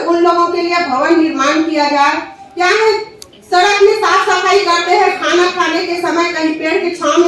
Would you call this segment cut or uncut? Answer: uncut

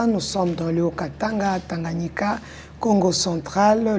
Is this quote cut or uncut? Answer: uncut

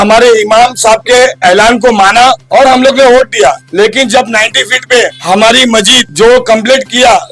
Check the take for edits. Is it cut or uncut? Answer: cut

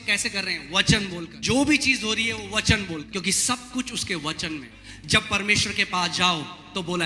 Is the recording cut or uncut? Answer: cut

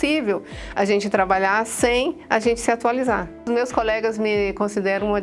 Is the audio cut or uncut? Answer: cut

